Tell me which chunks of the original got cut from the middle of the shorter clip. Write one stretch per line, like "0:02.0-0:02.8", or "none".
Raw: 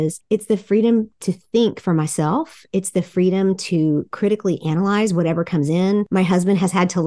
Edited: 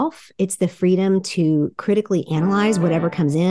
none